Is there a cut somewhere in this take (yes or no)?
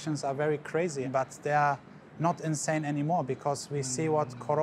yes